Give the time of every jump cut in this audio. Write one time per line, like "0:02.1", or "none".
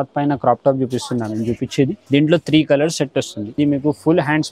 0:02.0
0:03.4

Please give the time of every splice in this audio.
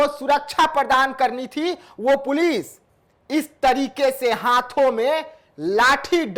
none

